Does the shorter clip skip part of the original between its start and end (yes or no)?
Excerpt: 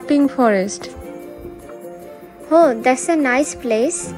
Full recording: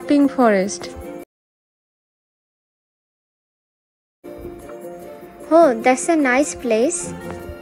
yes